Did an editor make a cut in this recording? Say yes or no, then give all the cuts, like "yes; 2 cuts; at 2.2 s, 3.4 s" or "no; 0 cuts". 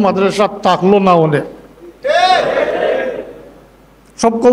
no; 0 cuts